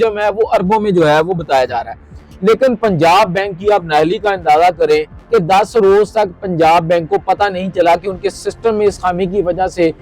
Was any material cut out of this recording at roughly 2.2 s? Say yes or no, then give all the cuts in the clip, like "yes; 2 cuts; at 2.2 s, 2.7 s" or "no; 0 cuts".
yes; 1 cut; at 2.2 s